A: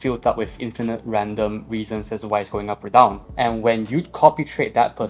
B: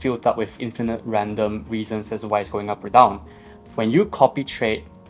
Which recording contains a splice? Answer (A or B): A